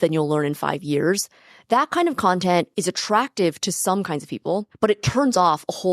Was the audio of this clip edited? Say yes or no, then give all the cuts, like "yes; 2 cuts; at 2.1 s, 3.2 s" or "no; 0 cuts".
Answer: yes; 2 cuts; at 2.7 s, 4.7 s